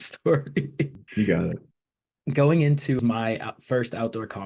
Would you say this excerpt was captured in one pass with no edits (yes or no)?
no